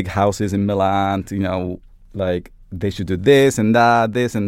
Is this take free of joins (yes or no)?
yes